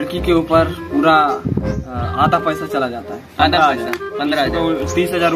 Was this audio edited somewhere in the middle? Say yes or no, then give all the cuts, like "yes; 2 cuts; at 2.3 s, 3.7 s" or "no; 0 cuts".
no; 0 cuts